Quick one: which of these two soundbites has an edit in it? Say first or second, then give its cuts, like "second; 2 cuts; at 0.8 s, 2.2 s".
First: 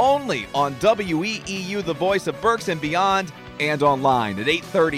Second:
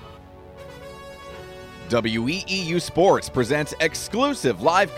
second; 1 cut; at 1.9 s